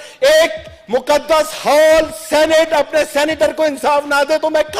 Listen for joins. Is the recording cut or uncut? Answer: uncut